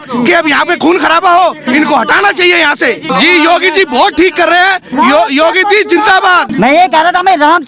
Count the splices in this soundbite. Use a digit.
2